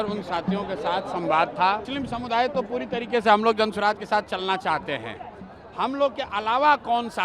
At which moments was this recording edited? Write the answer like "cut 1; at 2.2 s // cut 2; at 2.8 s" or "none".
cut 1; at 1.9 s